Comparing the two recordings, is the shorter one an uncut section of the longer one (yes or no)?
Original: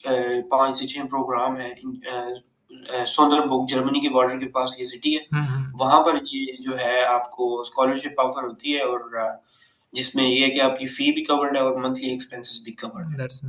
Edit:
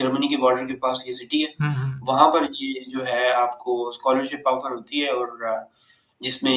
yes